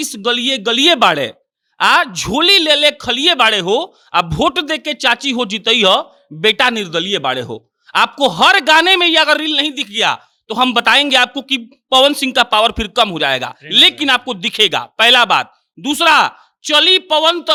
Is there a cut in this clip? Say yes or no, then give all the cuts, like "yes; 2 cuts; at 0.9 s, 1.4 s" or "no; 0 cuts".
no; 0 cuts